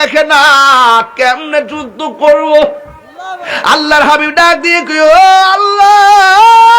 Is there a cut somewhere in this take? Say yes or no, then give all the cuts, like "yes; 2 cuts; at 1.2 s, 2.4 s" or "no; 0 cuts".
yes; 1 cut; at 3.5 s